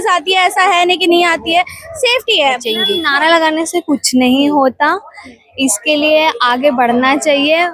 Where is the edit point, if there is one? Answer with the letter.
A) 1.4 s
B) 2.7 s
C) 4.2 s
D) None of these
B